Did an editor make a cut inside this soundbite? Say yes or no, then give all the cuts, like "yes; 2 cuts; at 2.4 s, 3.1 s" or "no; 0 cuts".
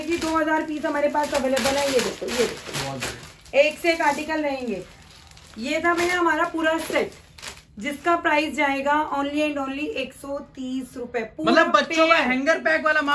no; 0 cuts